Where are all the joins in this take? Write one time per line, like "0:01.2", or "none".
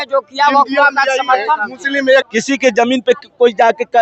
0:02.3

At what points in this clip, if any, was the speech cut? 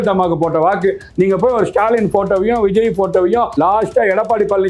0:01.0
0:03.5

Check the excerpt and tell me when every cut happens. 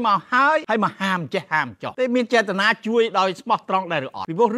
none

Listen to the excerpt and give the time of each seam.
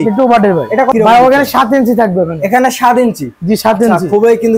0:00.9

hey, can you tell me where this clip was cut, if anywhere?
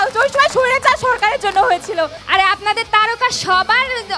0:02.2

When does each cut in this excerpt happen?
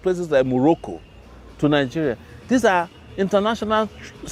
none

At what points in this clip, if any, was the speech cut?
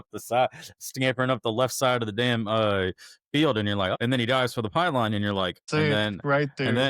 0:04.0
0:05.7

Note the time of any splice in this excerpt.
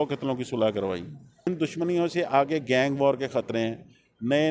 0:01.5

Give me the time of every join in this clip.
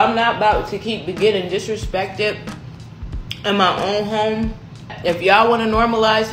0:04.9

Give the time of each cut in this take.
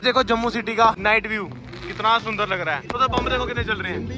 0:01.0
0:03.0

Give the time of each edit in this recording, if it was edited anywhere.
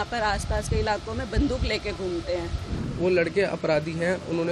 0:02.9

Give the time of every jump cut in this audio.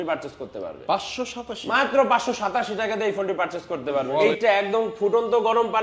0:04.2

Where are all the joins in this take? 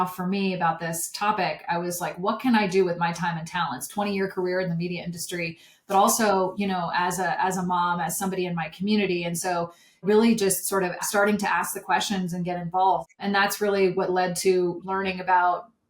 0:03.9
0:10.0
0:11.0
0:13.1
0:14.8

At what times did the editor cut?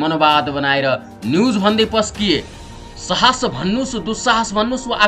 0:02.6

